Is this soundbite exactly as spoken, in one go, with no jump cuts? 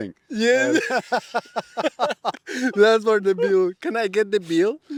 yes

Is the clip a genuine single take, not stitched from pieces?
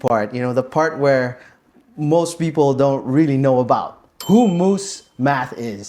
yes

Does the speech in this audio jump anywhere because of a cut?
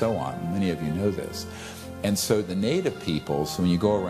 no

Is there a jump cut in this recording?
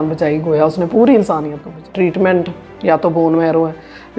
yes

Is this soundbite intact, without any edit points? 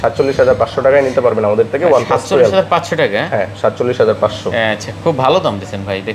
yes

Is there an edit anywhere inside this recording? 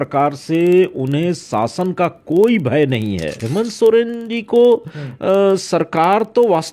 yes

